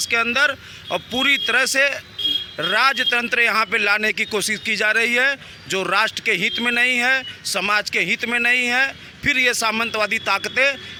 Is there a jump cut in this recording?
no; 0 cuts

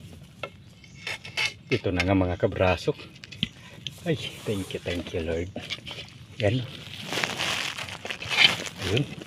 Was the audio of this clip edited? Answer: no; 0 cuts

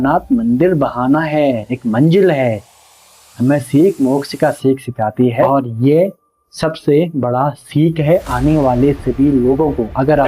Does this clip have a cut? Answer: yes; 1 cut; at 5.5 s

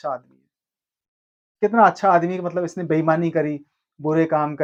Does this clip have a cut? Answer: no; 0 cuts

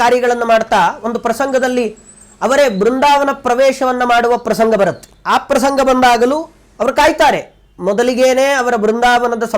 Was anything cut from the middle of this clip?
no; 0 cuts

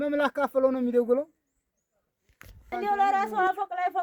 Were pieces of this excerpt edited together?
yes; 1 cut; at 2.7 s

